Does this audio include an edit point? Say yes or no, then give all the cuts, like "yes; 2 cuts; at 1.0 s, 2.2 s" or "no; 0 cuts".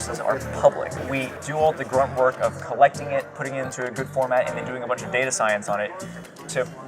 yes; 1 cut; at 1.0 s